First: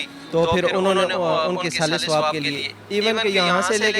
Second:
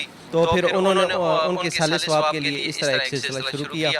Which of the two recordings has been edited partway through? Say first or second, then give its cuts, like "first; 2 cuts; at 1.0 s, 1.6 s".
first; 1 cut; at 2.6 s